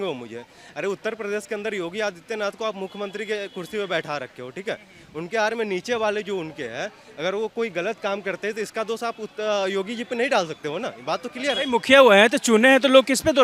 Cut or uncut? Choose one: uncut